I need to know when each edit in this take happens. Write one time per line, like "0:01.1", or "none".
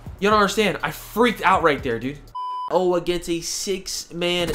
0:02.7